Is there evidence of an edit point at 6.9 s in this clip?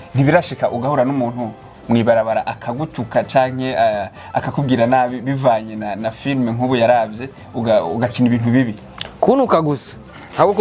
no; 0 cuts

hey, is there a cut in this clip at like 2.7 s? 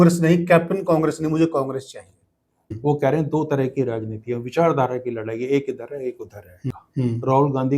yes; 2 cuts; at 2.7 s, 6.7 s

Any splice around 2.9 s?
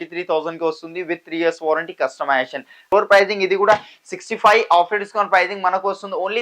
yes; 1 cut; at 2.9 s

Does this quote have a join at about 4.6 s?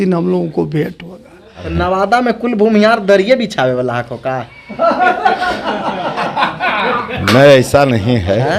no; 1 cut; at 1.7 s

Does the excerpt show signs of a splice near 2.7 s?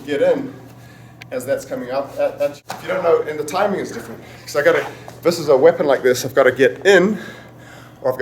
yes; 1 cut; at 2.7 s

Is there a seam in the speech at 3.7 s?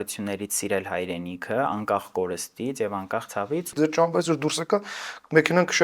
yes; 1 cut; at 3.7 s

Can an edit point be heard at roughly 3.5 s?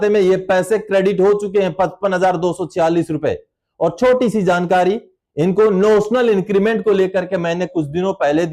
no; 0 cuts

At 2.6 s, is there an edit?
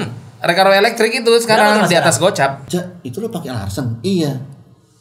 yes; 1 cut; at 2.6 s

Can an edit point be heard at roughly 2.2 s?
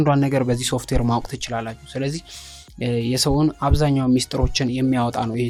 no; 0 cuts

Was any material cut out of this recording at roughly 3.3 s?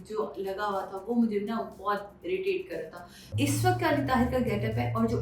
yes; 1 cut; at 3.3 s

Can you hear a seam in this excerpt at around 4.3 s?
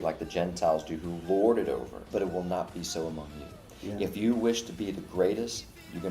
no; 1 cut; at 2.0 s

